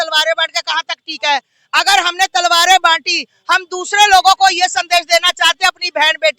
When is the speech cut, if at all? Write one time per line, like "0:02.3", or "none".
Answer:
none